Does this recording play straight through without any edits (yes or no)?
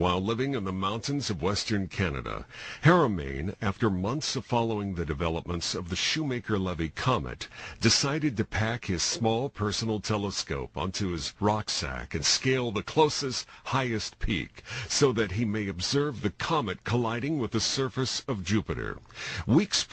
no